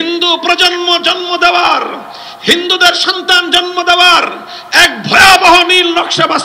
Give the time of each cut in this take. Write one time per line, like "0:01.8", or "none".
none